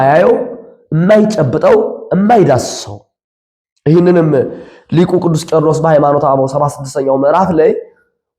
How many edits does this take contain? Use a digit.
0